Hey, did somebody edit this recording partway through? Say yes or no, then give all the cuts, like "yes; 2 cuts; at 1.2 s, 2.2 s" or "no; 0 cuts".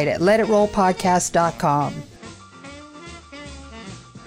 yes; 1 cut; at 2.5 s